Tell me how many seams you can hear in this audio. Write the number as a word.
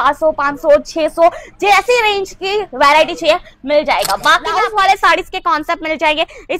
one